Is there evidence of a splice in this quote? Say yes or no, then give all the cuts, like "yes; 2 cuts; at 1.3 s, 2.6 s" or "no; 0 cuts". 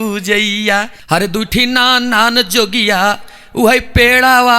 yes; 1 cut; at 1.0 s